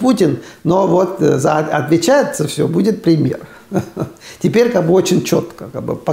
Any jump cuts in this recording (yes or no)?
no